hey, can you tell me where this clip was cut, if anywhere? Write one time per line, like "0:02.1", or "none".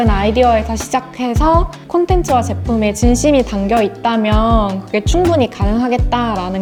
none